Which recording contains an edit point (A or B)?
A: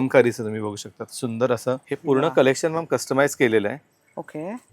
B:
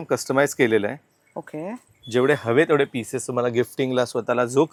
A